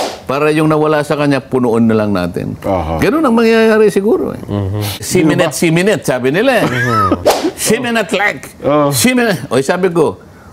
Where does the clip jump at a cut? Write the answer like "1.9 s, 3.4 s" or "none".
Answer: 5.0 s